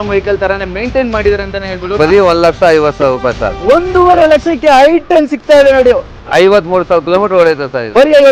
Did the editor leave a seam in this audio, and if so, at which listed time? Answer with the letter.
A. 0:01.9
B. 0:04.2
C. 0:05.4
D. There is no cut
A